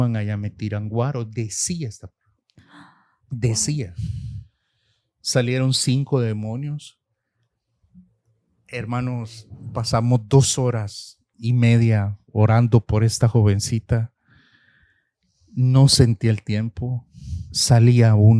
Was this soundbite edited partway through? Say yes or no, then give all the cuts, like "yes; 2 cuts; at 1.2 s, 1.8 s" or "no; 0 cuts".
no; 0 cuts